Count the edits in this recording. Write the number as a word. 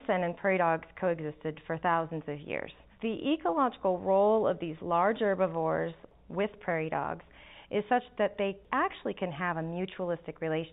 three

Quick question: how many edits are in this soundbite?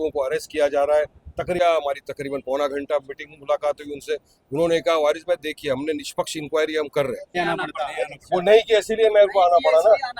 two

